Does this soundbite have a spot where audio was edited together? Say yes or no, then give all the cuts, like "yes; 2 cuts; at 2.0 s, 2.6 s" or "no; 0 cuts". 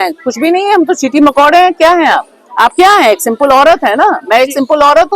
no; 0 cuts